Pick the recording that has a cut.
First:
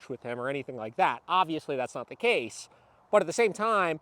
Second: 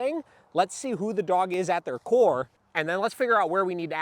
second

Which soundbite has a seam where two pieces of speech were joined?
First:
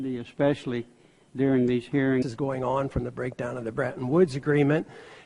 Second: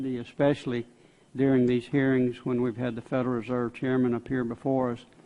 second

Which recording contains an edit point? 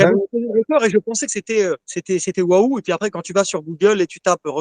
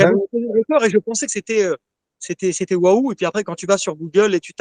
first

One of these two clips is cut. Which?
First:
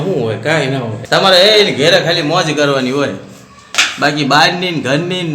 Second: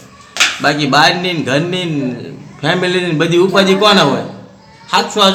first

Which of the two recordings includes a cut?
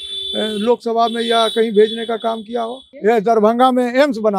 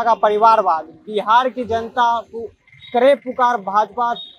first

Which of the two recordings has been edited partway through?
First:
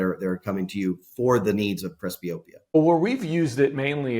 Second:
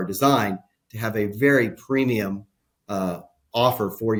first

